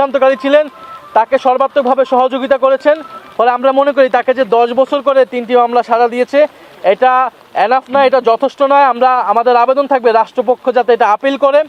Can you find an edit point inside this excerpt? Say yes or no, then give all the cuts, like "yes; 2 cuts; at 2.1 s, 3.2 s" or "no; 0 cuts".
no; 0 cuts